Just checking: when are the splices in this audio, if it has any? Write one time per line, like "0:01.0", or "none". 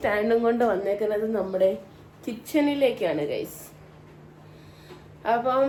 none